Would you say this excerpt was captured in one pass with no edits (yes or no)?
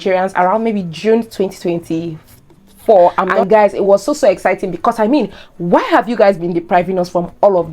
no